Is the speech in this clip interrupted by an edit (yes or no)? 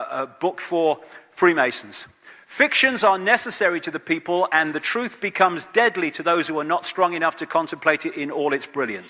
no